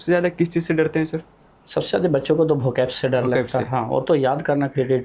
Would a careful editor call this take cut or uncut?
uncut